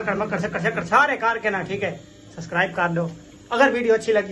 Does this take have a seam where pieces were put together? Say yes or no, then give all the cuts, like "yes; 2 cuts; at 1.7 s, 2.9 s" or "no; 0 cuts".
no; 0 cuts